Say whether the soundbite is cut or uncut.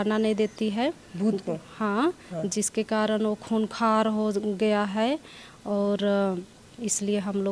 uncut